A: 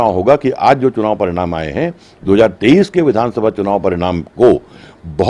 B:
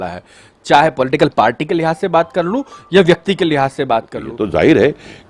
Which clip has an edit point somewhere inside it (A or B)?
B